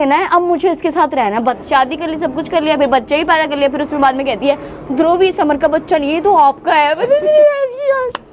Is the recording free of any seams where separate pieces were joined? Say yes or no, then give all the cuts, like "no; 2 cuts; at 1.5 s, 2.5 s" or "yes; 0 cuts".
no; 1 cut; at 1.6 s